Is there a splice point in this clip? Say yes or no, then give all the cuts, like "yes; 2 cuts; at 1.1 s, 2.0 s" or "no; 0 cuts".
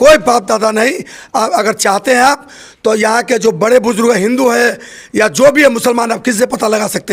no; 0 cuts